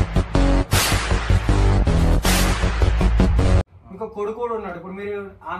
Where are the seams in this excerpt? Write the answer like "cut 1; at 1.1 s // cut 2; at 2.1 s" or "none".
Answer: cut 1; at 3.7 s